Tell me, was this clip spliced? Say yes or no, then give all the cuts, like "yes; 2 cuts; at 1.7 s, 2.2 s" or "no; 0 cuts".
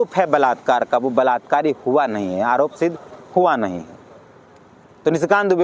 no; 0 cuts